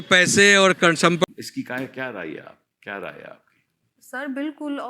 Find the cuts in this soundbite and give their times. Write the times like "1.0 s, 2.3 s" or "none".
1.2 s

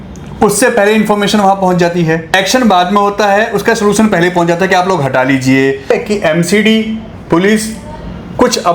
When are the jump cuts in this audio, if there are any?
2.3 s, 5.9 s

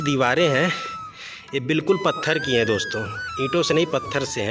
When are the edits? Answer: none

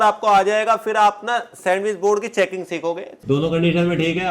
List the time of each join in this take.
3.1 s

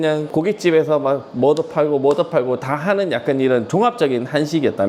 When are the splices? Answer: none

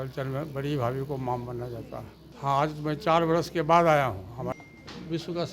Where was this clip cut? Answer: 2.2 s, 4.5 s

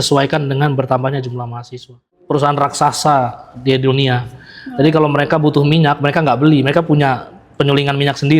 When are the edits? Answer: 2.1 s

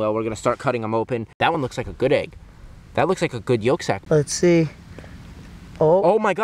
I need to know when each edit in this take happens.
1.5 s, 4.3 s

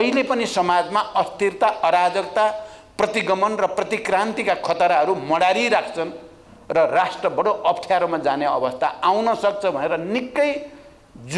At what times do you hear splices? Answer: none

